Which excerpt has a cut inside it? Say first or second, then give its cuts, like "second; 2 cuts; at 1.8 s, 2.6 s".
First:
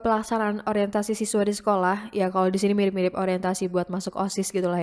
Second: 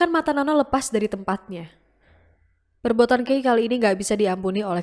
second; 1 cut; at 2.3 s